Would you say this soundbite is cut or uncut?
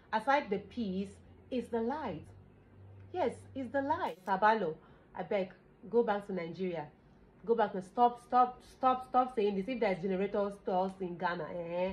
cut